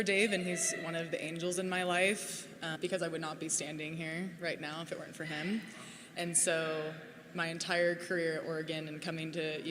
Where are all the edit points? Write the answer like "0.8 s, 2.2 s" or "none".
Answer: 2.8 s